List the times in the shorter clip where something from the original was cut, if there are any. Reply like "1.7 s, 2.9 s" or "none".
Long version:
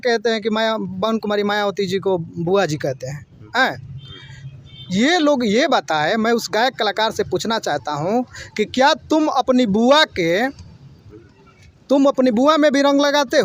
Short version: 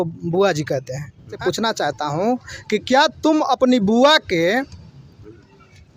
1.4 s

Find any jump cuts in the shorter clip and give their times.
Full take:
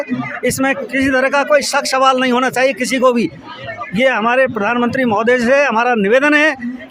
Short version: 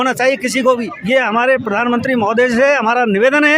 0.9 s

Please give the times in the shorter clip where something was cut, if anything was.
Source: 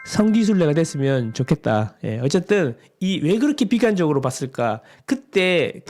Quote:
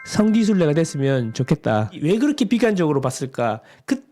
2.0 s

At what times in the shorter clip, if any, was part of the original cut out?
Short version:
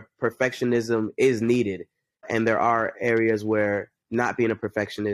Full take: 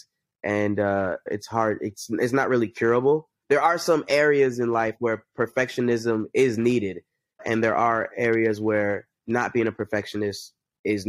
none

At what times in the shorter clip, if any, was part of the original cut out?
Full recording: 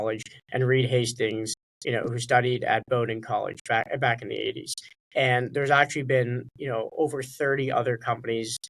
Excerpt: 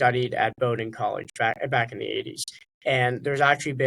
none

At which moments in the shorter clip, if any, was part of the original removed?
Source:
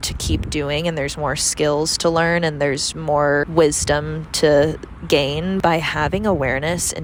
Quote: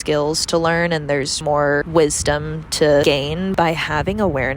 1.3 s, 3.0 s

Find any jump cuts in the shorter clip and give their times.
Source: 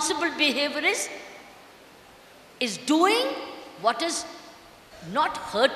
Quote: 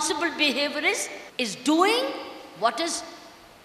1.2 s

